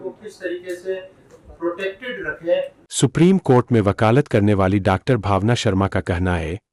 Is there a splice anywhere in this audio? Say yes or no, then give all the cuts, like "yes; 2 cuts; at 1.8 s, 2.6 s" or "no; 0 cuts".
no; 0 cuts